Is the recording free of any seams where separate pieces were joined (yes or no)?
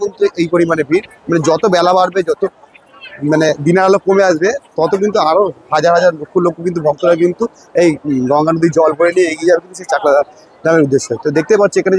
yes